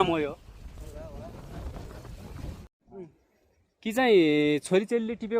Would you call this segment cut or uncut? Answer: cut